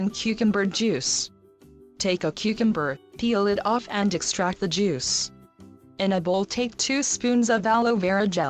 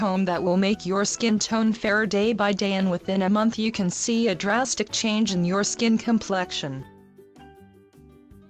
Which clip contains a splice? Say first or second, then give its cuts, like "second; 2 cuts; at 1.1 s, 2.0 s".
first; 1 cut; at 4.9 s